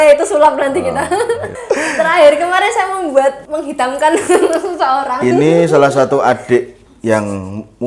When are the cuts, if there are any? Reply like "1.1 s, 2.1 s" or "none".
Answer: 1.5 s, 3.4 s